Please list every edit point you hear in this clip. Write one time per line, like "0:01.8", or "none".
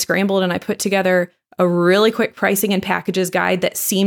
none